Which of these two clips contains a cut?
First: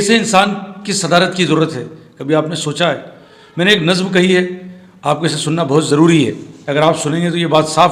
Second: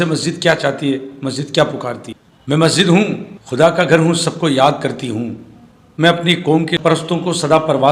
second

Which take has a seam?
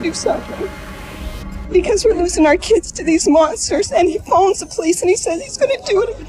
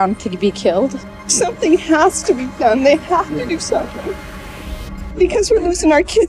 second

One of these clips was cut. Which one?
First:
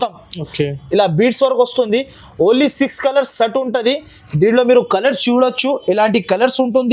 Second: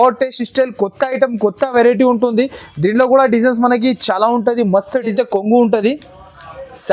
second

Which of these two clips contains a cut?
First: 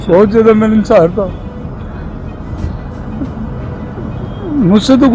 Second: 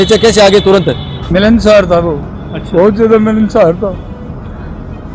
second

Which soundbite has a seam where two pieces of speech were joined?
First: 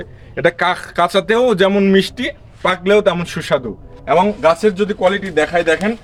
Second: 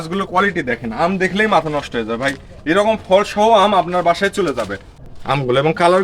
second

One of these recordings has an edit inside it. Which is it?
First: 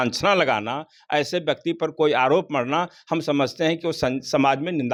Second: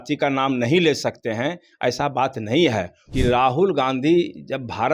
second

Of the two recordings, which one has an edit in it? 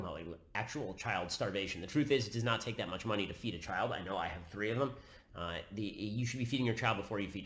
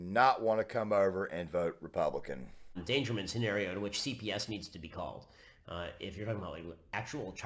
second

